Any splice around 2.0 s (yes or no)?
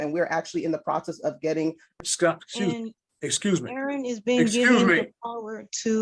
yes